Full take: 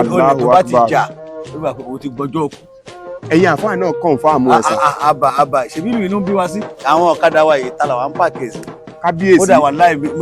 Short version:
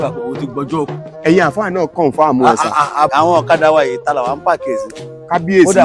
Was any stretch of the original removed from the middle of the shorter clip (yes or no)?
yes